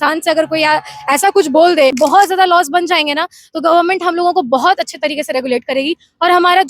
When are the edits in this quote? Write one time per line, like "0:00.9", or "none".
0:02.0